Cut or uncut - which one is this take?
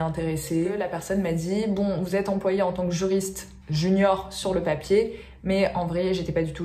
cut